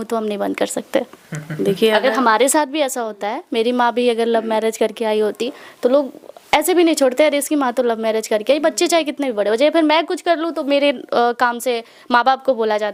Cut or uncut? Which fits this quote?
uncut